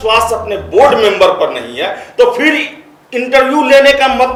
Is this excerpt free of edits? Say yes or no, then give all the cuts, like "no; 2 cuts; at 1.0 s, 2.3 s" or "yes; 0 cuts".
yes; 0 cuts